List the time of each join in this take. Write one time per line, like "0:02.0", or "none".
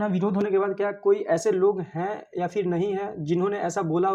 none